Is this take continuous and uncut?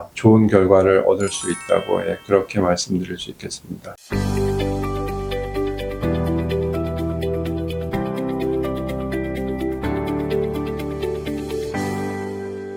yes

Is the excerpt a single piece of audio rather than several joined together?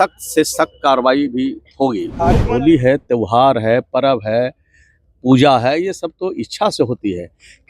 no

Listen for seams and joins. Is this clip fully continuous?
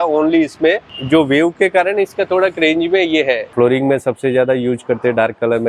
no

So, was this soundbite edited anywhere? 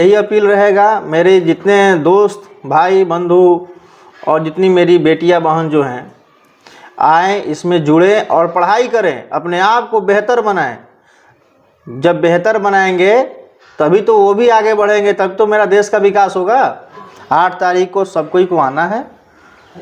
no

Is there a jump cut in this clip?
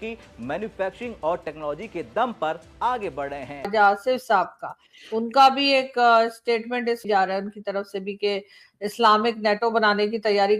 yes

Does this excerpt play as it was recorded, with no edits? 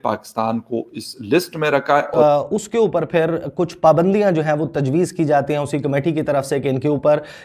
no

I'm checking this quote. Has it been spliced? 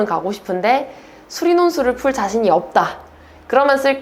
no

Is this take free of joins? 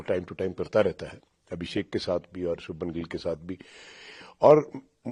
yes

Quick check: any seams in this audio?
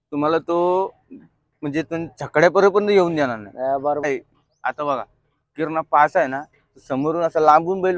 yes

